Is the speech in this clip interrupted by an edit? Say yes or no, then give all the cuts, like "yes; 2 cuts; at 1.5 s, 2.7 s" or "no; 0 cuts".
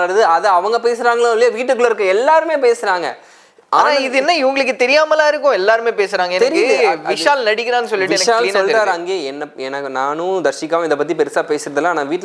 no; 0 cuts